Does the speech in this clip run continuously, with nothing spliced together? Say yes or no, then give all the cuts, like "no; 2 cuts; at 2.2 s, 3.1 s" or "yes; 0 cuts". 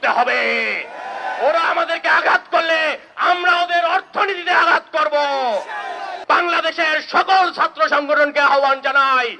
no; 1 cut; at 6.1 s